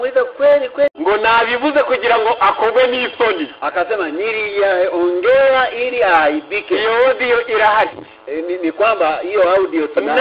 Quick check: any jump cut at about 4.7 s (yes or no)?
no